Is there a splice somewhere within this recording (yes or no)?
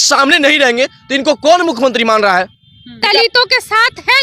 yes